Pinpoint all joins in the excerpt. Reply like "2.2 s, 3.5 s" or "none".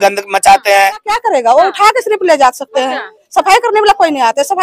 1.1 s